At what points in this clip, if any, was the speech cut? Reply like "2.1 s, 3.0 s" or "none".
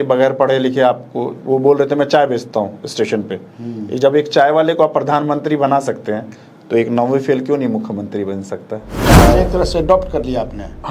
9.1 s